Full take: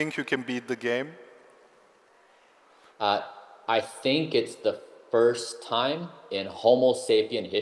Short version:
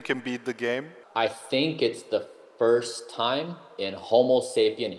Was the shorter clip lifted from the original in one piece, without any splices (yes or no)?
no